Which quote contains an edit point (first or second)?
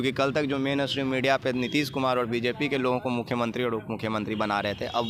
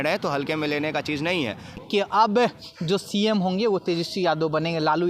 second